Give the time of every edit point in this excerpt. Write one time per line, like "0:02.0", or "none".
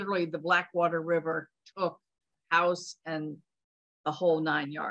none